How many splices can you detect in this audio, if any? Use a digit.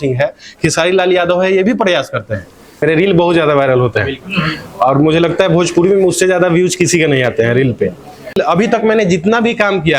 2